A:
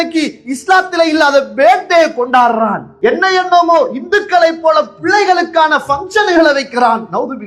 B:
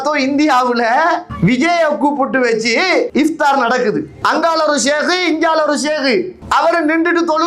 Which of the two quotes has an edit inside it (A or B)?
B